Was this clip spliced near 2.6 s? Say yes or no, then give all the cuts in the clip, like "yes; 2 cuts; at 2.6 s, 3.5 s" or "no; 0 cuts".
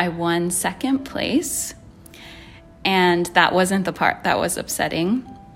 no; 0 cuts